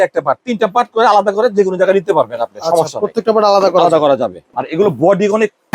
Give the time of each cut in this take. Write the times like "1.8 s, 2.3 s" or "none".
4.4 s